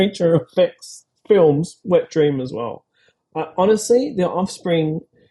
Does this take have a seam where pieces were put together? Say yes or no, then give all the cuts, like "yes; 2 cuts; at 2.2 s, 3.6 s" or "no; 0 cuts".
no; 0 cuts